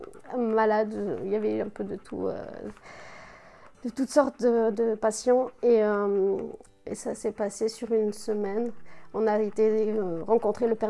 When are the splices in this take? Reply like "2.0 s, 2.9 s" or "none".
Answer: 6.8 s